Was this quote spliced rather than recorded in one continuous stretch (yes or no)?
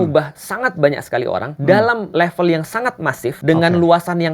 yes